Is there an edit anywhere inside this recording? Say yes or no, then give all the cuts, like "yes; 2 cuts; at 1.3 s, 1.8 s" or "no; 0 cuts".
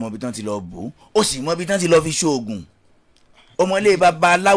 no; 0 cuts